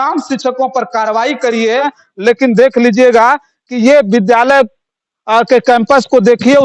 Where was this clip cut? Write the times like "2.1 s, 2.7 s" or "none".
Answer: 2.0 s